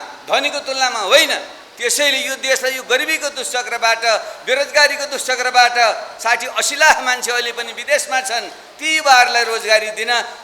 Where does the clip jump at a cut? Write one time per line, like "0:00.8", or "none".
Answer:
none